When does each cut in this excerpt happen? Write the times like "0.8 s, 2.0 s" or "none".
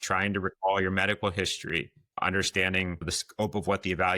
2.2 s, 3.0 s